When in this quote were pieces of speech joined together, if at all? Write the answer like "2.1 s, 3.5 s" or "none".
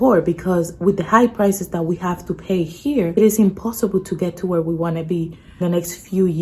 3.2 s

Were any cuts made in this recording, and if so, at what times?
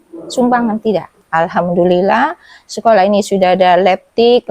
1.2 s

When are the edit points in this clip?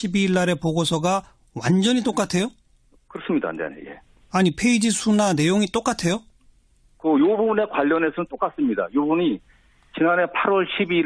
none

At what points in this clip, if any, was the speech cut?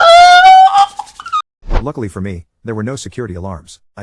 1.8 s

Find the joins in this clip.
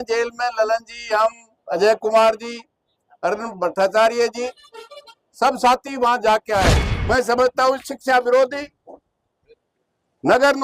6.9 s

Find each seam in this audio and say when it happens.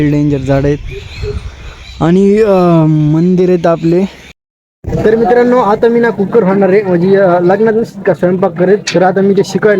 4.3 s

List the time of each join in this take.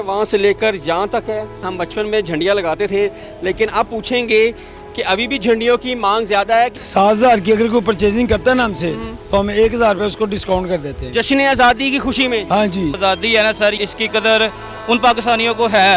1.8 s, 6.8 s, 13.0 s, 13.8 s

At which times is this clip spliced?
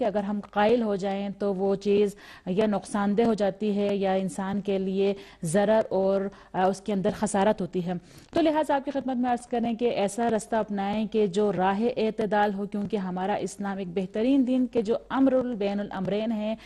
8.9 s

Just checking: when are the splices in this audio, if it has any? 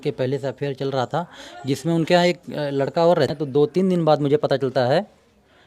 3.3 s

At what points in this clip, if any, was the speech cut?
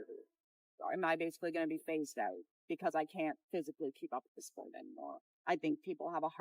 5.3 s

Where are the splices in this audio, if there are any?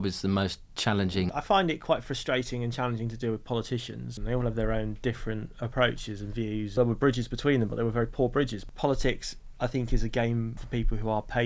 1.3 s, 4.2 s, 6.7 s, 8.6 s, 10.6 s

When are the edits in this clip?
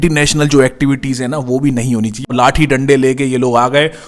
2.3 s

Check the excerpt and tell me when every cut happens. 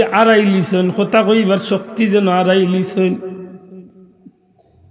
none

